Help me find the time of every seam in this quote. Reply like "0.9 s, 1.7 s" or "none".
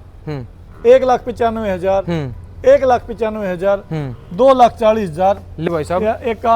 5.6 s